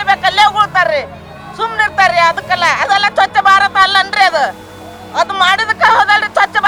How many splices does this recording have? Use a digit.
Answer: 0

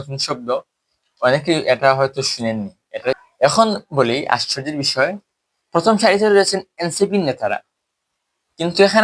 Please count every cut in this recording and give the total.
1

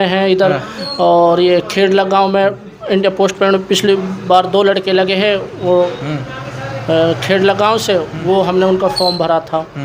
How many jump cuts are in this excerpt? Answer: 0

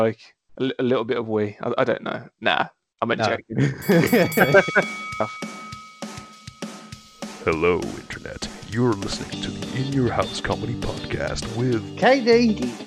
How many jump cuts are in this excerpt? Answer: 1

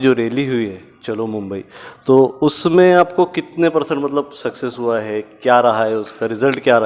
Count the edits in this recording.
0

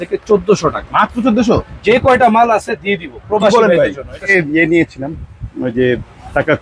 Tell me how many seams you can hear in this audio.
1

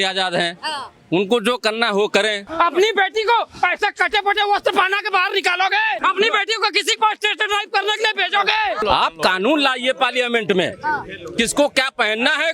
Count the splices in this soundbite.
3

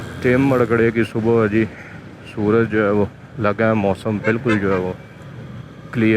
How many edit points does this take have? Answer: 0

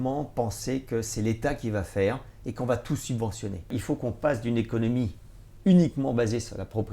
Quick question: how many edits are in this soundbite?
1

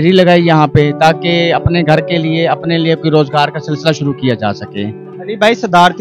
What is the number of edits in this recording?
0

